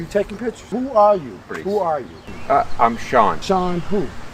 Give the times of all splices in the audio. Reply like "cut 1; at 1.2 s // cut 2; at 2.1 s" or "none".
cut 1; at 0.7 s // cut 2; at 1.5 s // cut 3; at 3.4 s